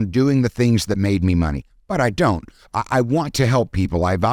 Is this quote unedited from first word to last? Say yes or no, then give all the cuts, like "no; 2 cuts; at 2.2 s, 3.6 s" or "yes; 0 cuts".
yes; 0 cuts